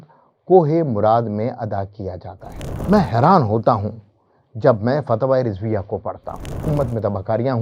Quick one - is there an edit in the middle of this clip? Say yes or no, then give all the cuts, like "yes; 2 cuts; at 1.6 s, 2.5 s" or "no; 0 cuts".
yes; 2 cuts; at 2.7 s, 6.6 s